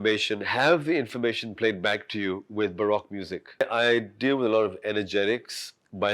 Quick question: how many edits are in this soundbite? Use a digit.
1